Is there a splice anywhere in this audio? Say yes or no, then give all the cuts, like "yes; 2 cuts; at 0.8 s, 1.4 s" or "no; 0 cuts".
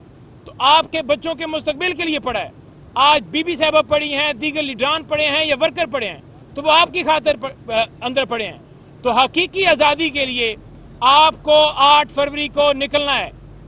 no; 0 cuts